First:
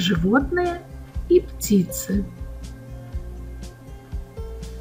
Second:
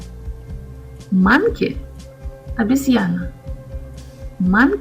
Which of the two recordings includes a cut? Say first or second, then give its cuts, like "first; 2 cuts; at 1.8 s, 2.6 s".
second; 1 cut; at 1.1 s